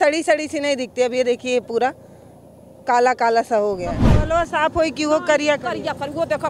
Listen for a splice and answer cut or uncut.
cut